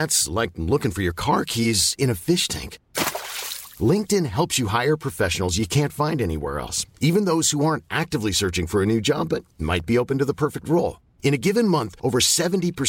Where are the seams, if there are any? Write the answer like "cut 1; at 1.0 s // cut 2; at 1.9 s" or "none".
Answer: none